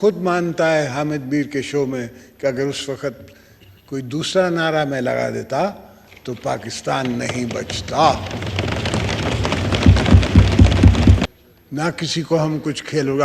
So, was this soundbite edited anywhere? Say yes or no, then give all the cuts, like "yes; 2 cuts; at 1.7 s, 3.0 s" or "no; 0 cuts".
yes; 1 cut; at 11.2 s